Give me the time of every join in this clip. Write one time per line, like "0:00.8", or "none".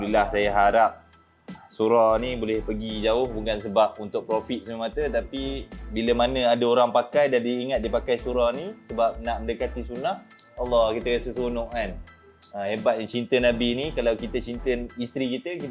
0:01.5

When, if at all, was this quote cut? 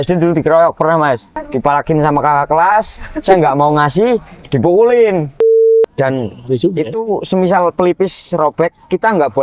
0:01.3
0:05.7

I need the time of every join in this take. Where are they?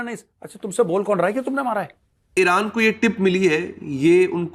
0:02.3

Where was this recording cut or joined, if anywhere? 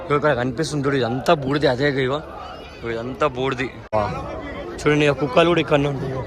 0:03.9

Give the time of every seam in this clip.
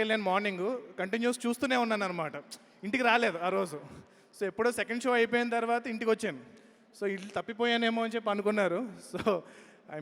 none

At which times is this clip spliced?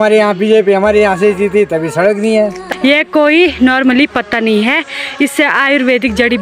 0:02.6

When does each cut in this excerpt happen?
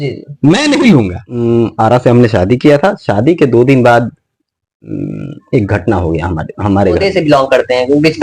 0:01.2
0:07.0

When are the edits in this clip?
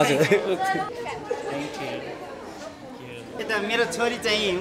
0:00.9
0:03.3

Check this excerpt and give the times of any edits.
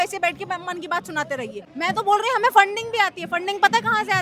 0:01.6

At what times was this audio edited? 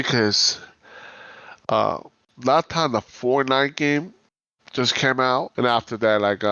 0:05.5

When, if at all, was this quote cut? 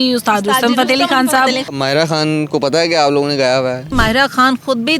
0:01.7
0:03.9

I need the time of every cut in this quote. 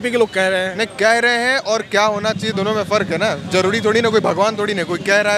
none

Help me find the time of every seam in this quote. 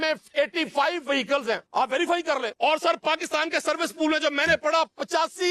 0:01.6
0:02.5

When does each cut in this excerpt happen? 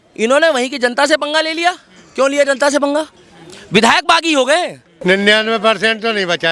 0:04.9

